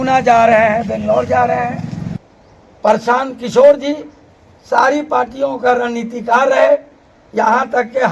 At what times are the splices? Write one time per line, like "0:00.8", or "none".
0:02.2